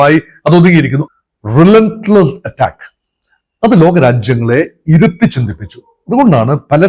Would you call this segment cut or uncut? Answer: cut